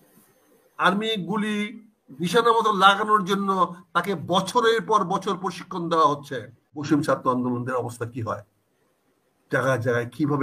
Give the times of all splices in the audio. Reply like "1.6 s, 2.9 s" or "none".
6.7 s